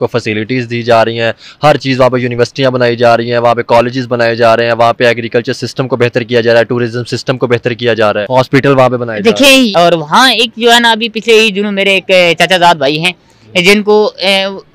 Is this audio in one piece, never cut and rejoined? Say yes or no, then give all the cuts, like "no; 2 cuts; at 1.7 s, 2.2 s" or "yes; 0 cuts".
no; 2 cuts; at 8.2 s, 9.7 s